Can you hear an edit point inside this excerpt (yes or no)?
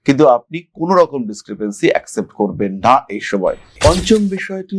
yes